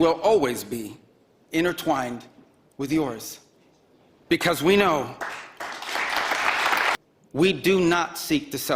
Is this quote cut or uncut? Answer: cut